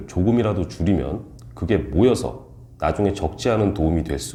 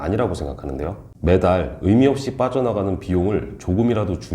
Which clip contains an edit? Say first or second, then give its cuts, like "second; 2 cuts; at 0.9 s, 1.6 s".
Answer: second; 1 cut; at 1.1 s